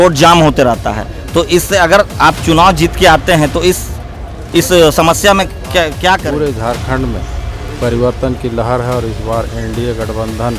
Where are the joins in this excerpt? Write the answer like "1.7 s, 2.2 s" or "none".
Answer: 6.2 s